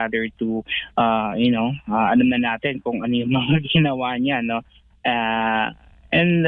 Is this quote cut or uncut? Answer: uncut